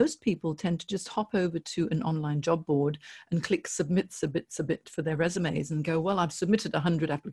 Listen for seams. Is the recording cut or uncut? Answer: uncut